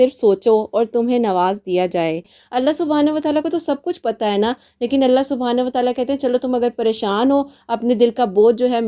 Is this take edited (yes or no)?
yes